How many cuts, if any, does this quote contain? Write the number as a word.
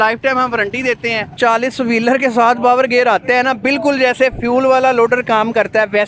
one